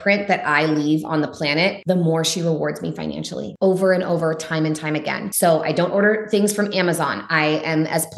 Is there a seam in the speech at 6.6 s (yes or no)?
no